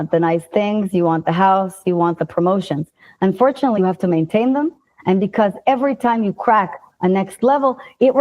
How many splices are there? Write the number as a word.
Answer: one